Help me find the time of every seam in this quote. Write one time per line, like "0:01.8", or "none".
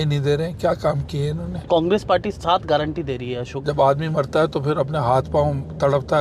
0:01.6
0:03.5